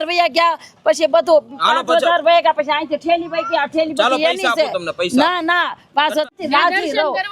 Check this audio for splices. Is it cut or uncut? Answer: cut